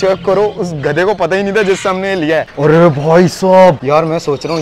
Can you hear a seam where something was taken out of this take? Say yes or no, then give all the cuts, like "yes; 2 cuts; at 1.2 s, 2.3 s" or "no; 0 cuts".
yes; 2 cuts; at 2.5 s, 3.8 s